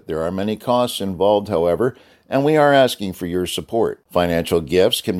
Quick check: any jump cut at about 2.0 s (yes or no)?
no